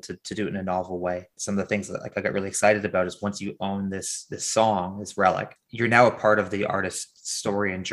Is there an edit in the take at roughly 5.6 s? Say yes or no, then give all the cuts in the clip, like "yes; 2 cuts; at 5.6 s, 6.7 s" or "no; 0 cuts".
yes; 2 cuts; at 1.4 s, 5.6 s